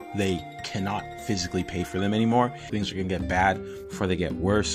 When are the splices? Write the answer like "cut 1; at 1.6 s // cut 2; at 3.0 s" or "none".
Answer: cut 1; at 2.7 s